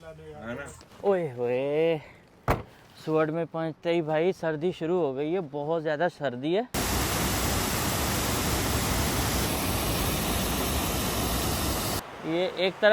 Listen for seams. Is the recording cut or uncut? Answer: cut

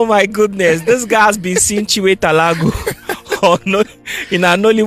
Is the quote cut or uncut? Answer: uncut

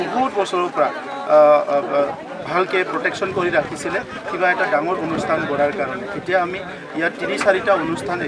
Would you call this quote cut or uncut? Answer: uncut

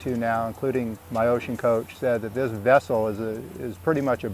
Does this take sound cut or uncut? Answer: uncut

